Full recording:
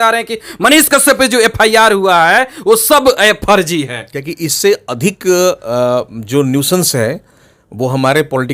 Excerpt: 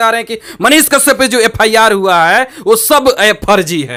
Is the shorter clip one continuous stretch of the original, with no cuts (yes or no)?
yes